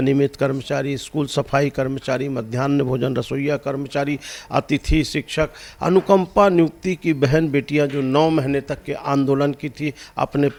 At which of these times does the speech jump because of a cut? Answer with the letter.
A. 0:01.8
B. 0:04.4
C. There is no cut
C